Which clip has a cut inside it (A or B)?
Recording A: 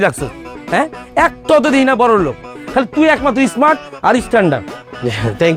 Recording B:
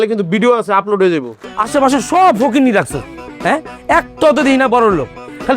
B